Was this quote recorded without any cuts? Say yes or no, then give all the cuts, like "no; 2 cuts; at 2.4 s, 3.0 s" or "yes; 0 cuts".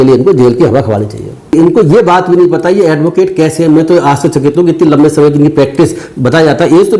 no; 1 cut; at 1.5 s